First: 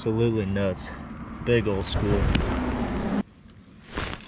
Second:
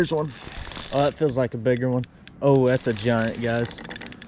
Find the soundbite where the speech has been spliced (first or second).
first